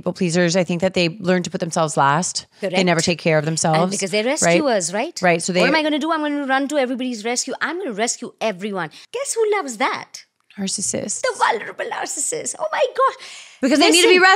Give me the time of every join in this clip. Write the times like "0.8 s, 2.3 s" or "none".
9.0 s